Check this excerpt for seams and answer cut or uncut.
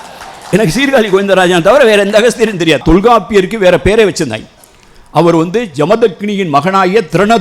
cut